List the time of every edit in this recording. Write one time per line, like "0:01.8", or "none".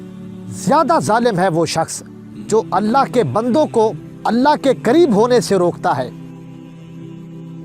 0:04.1
0:06.6

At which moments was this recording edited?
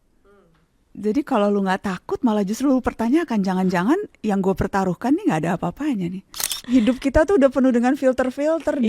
0:06.6

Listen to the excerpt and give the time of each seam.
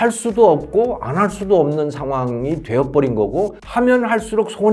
0:03.6

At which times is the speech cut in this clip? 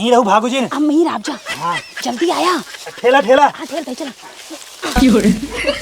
0:04.9

